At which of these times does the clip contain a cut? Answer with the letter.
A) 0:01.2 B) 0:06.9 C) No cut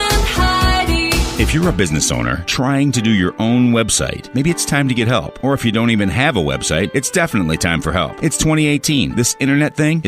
A